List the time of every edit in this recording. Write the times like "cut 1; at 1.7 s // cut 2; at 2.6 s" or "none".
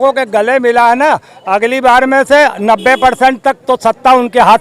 none